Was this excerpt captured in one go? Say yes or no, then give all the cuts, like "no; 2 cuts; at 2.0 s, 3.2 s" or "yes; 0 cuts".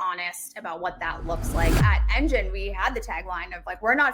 no; 1 cut; at 1.7 s